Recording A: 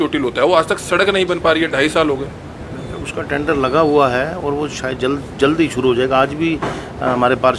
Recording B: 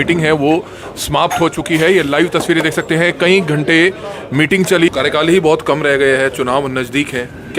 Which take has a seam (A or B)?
B